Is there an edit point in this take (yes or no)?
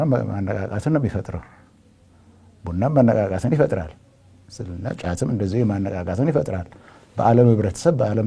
no